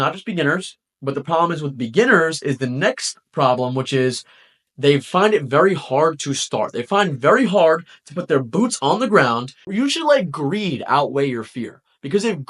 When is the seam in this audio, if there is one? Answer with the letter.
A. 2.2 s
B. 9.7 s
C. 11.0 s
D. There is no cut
B